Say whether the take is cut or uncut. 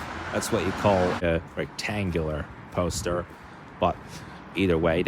cut